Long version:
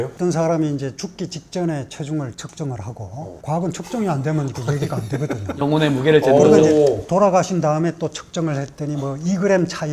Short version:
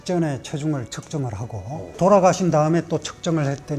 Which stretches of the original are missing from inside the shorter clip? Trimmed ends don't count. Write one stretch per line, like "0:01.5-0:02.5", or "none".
0:03.4-0:07.0